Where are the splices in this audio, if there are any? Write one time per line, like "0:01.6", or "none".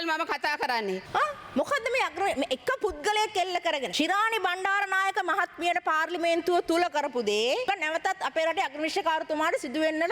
0:01.0
0:03.9
0:07.7